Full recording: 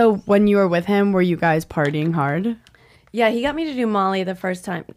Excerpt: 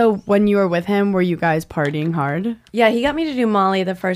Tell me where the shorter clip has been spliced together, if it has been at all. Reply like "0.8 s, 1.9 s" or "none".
2.6 s